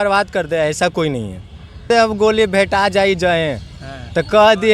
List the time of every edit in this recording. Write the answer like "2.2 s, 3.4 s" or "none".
1.8 s